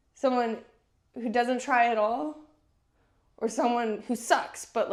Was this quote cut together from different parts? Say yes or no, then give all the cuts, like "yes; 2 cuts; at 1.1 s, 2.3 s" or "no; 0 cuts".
no; 0 cuts